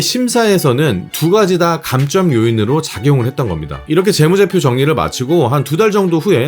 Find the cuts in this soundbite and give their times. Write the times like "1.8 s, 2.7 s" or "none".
3.7 s

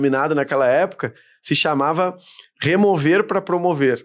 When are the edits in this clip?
none

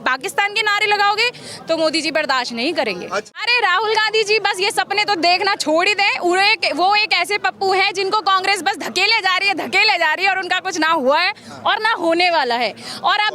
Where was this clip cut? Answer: 3.4 s

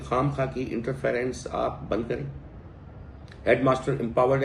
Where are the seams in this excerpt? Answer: none

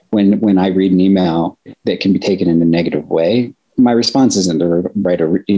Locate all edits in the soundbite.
1.7 s, 3.7 s

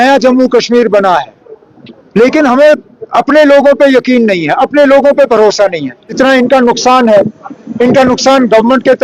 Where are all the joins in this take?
6.0 s

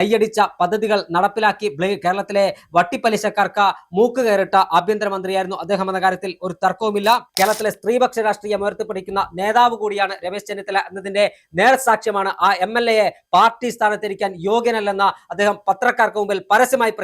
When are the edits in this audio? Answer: 7.3 s

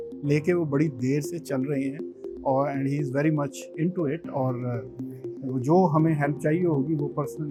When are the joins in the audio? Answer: none

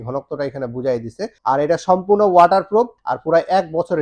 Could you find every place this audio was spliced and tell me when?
1.3 s, 3.0 s

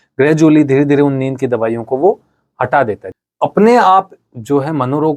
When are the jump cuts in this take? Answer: 3.1 s

